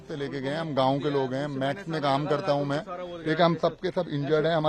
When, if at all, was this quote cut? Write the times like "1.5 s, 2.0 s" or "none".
none